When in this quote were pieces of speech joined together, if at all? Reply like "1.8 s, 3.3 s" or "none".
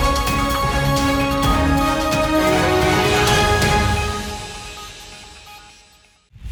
none